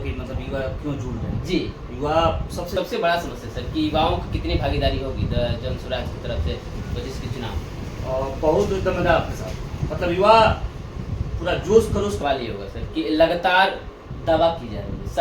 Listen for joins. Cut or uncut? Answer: cut